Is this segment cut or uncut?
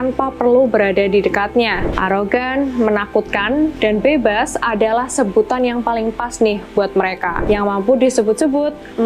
cut